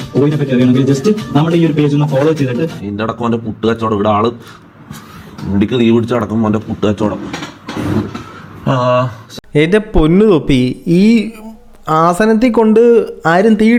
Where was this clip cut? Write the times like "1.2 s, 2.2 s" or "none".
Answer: none